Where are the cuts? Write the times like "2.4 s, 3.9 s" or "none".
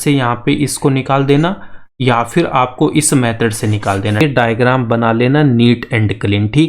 4.2 s